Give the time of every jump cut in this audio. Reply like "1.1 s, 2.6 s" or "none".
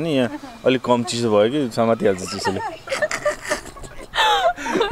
none